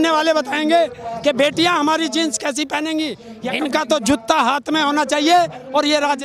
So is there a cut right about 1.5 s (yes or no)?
no